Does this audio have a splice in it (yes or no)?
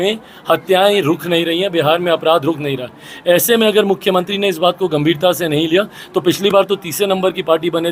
no